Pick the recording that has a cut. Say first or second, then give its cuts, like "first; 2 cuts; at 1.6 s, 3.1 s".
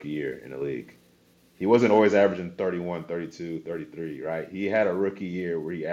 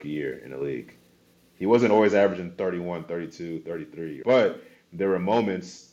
second; 1 cut; at 4.1 s